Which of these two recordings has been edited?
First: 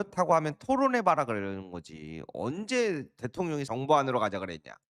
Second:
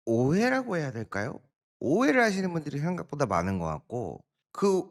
first; 1 cut; at 3.7 s

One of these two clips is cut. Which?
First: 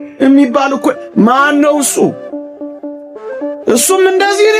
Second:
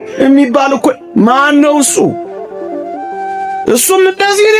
second; 2 cuts; at 2.2 s, 3.6 s

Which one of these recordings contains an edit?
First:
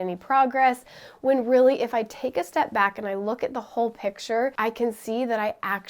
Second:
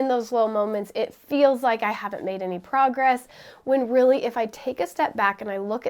first; 1 cut; at 4.6 s

